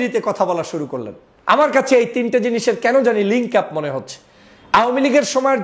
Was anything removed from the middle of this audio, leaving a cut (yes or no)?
yes